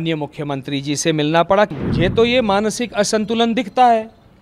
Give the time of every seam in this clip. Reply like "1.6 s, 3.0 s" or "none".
1.7 s